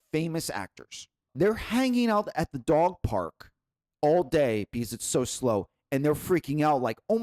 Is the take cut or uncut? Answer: cut